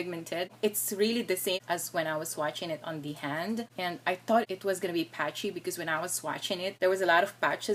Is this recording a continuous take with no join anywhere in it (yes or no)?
yes